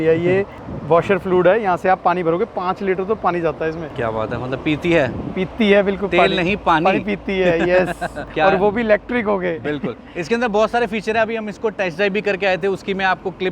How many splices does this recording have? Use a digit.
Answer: 0